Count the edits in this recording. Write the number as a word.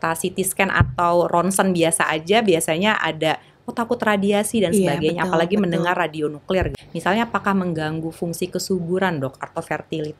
one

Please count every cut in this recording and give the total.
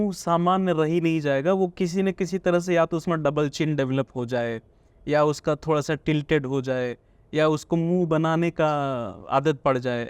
one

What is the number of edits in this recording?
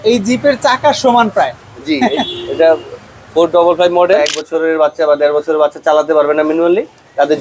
one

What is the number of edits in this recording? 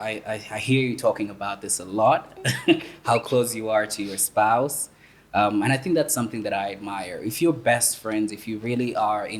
zero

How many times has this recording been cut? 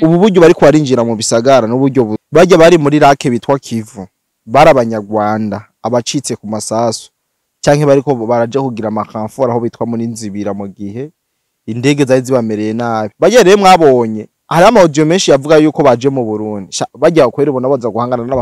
two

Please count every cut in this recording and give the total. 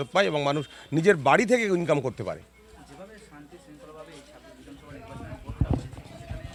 zero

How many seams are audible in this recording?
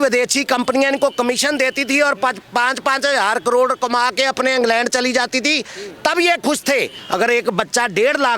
one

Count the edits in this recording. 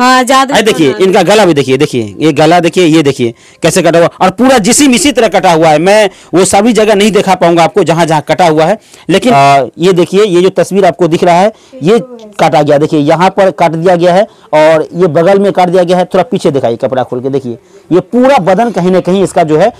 one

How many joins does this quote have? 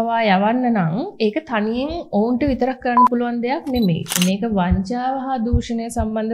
one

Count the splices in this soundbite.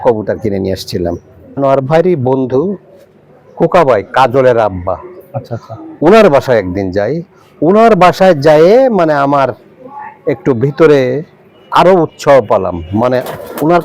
one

